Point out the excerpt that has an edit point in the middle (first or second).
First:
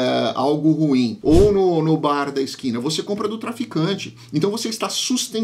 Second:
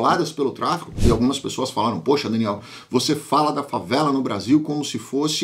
first